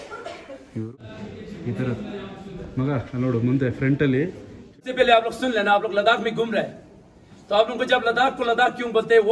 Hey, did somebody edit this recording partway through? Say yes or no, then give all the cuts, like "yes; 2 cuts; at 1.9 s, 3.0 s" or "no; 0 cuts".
yes; 2 cuts; at 0.9 s, 4.8 s